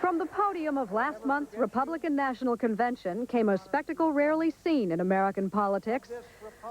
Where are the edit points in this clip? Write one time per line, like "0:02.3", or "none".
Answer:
0:04.9